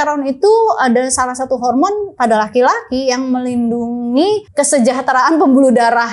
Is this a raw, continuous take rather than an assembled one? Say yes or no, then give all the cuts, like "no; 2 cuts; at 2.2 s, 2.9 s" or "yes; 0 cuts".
no; 1 cut; at 4.5 s